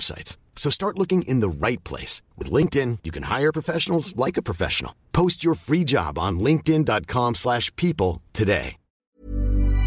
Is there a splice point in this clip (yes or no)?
yes